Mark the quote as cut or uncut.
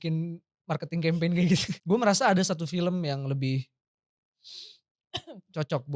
cut